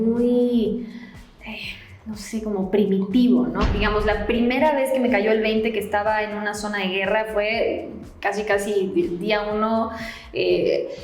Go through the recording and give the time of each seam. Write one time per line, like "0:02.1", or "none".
0:03.7